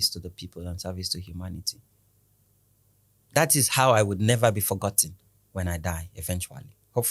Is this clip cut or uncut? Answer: uncut